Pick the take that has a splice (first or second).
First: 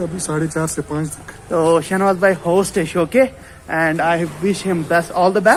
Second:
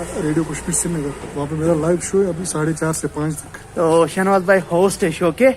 second